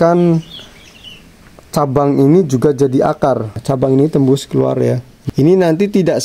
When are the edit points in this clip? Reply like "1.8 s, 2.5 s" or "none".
3.6 s, 5.1 s